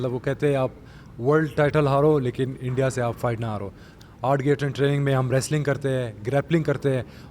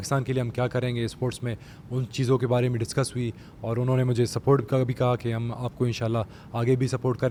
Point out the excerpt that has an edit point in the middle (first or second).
first